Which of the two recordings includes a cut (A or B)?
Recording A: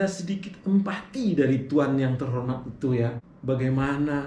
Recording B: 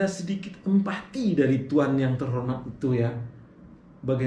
A